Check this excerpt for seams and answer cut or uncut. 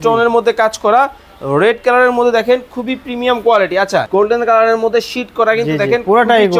cut